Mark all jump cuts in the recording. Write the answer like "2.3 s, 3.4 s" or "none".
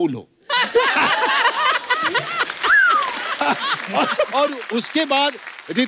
3.4 s